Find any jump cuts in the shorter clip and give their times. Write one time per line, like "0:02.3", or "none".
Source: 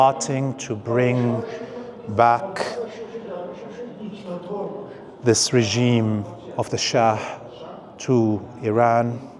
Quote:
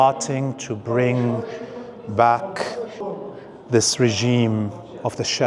0:03.0

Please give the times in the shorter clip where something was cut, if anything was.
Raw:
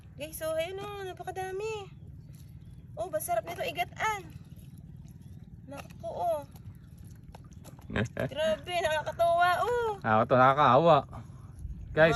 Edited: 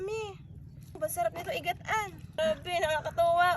0:01.0
0:02.3

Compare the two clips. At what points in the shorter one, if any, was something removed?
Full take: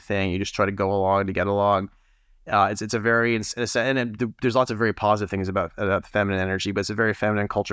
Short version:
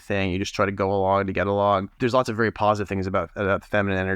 0:01.9

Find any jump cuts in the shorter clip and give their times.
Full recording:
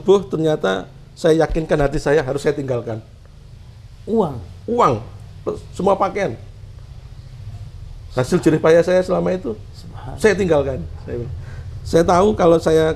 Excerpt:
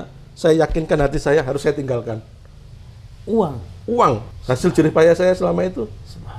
0:04.3

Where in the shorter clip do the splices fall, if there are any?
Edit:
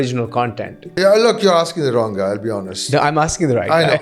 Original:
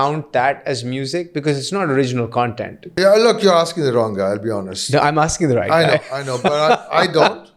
none

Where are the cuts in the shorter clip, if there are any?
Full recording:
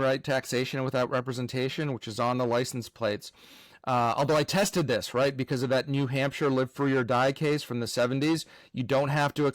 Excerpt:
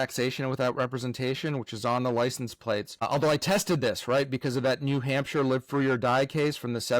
0:03.0

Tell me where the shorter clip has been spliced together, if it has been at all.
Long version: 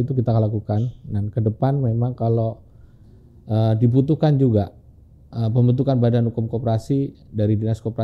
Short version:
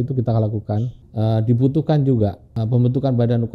0:01.0
0:02.5

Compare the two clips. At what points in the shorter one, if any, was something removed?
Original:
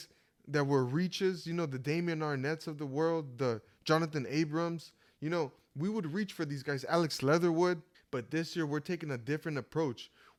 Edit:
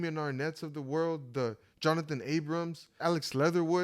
0:02.9

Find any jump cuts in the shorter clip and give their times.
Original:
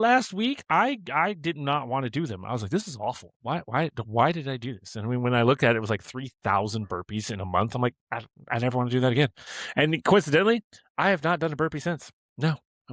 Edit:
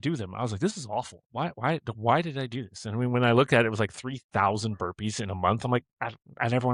none

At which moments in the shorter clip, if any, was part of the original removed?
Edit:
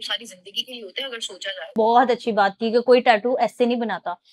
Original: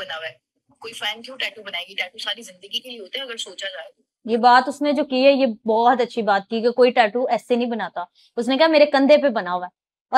0:01.7

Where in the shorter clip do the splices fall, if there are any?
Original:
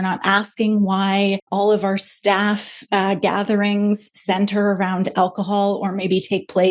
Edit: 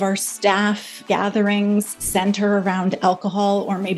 0:01.0

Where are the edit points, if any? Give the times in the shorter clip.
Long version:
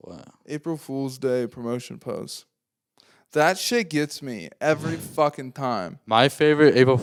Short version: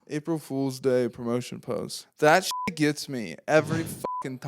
0:02.0

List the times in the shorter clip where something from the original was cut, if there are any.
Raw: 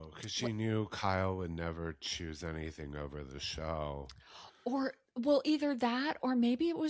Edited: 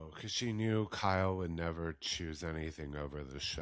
none

